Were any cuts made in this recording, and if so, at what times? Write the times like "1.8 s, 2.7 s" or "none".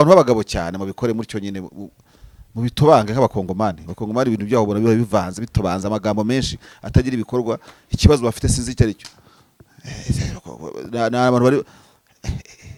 none

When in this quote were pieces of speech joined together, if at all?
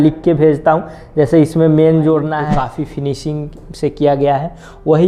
2.4 s

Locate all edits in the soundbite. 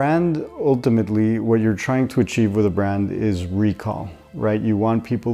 none

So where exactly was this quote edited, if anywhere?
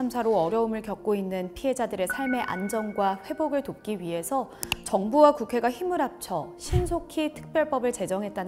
none

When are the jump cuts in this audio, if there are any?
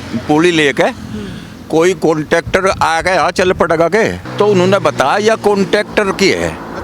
4.2 s

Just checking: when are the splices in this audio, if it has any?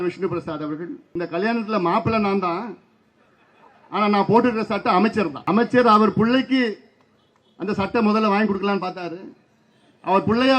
1.0 s, 5.4 s

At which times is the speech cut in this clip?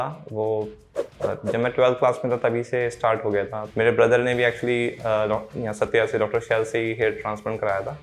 3.6 s

